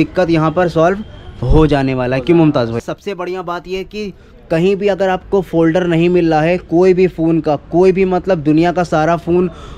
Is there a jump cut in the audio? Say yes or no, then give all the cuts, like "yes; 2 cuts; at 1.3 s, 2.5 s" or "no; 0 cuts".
yes; 1 cut; at 2.8 s